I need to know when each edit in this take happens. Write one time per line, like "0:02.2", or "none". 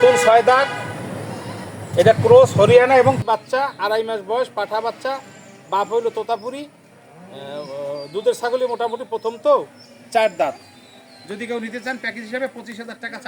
0:03.2